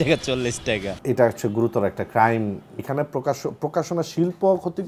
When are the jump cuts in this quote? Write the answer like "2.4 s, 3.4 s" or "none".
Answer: 1.0 s, 2.8 s